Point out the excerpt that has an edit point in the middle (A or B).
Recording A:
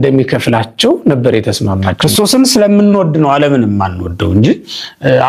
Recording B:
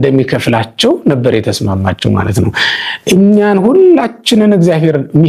A